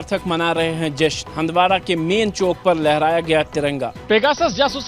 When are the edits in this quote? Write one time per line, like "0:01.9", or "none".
0:03.9